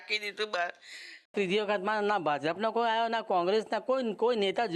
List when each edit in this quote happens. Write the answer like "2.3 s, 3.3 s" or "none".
1.3 s